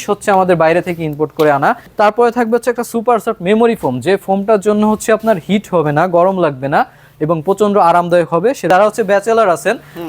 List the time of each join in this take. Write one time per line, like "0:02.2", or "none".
0:01.8
0:08.7